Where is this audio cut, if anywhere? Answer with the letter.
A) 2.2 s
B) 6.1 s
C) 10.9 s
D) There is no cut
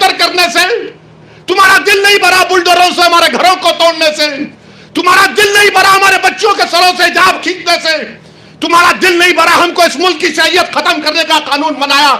D